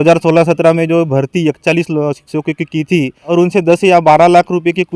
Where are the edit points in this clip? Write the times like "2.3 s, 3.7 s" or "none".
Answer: 3.3 s